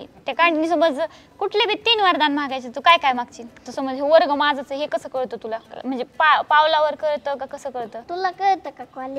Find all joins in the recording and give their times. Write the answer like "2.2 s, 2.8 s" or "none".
3.6 s, 5.7 s, 8.0 s